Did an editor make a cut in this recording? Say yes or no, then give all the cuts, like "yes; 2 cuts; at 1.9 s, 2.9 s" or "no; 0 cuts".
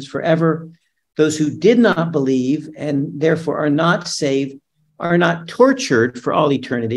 no; 0 cuts